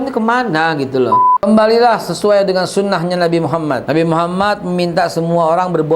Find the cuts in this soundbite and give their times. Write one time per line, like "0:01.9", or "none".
0:01.4
0:03.8